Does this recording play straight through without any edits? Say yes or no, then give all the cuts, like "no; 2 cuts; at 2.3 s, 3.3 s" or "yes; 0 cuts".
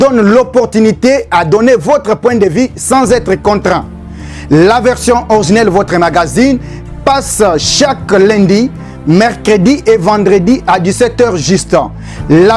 yes; 0 cuts